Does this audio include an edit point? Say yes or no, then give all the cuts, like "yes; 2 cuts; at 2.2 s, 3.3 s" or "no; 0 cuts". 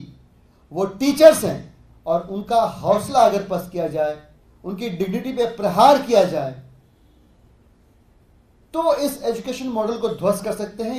no; 0 cuts